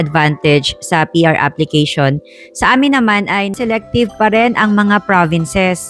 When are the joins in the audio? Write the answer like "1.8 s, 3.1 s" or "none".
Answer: 3.6 s